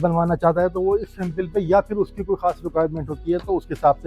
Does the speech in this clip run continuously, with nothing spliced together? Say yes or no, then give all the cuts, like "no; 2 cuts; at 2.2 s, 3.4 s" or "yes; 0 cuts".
yes; 0 cuts